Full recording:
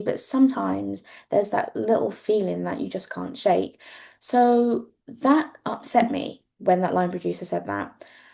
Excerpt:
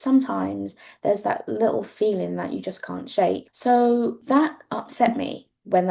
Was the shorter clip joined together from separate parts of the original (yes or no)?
yes